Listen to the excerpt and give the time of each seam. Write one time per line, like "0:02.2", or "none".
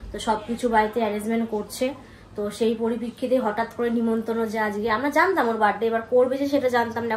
none